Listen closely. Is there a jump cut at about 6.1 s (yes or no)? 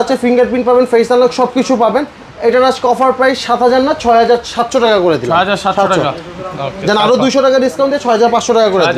no